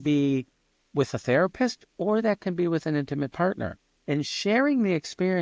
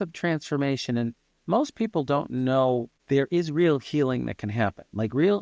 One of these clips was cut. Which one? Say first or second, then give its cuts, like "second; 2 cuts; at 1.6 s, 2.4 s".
second; 1 cut; at 2.9 s